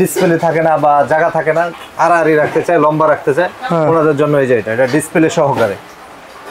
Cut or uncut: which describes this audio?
uncut